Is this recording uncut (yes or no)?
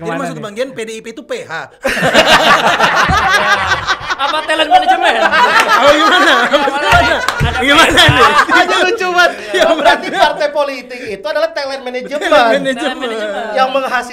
yes